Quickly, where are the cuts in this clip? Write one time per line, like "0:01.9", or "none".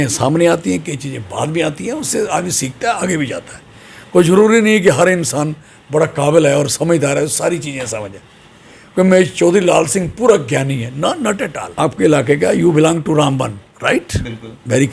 0:11.6